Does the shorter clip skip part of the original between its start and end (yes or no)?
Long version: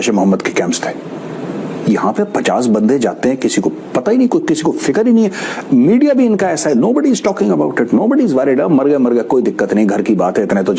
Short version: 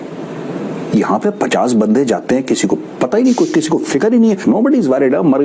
yes